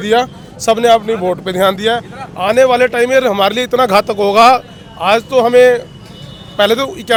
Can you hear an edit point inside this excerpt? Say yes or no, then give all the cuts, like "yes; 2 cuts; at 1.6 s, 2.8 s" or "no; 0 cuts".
no; 0 cuts